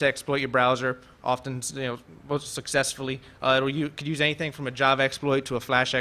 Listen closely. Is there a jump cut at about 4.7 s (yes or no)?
yes